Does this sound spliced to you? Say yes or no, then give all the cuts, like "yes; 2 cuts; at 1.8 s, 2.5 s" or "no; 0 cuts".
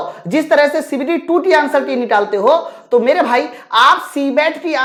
no; 0 cuts